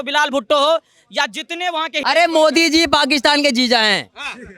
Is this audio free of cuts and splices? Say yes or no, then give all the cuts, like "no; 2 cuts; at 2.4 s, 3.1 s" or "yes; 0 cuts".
no; 1 cut; at 2.0 s